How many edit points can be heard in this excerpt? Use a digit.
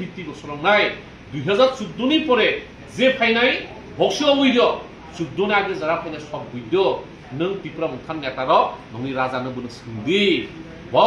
1